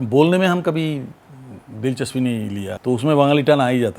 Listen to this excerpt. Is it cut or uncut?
cut